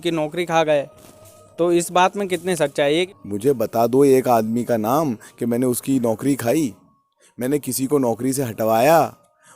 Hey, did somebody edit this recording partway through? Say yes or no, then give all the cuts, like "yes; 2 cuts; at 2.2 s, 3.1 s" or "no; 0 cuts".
yes; 1 cut; at 3.1 s